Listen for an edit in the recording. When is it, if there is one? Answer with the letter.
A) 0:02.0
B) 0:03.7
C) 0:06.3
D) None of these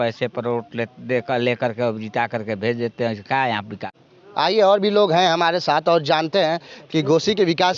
B